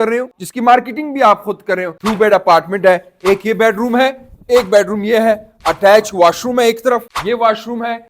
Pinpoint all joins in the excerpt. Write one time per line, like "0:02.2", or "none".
0:01.9